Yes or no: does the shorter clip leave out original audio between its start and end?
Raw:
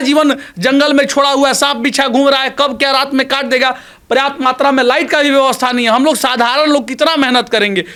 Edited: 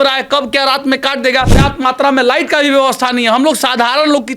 yes